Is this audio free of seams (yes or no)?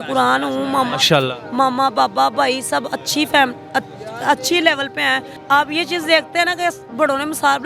no